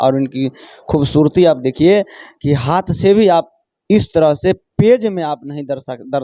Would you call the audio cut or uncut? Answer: uncut